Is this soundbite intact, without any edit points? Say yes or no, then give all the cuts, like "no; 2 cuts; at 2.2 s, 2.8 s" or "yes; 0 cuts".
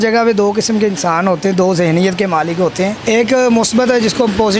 no; 1 cut; at 3.0 s